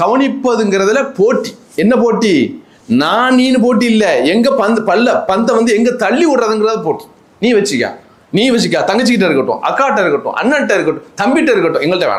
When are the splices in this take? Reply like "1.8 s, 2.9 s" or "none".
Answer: none